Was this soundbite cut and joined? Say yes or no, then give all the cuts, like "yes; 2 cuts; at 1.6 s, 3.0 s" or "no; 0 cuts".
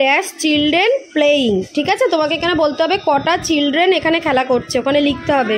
no; 0 cuts